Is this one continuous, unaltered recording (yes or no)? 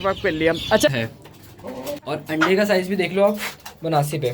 no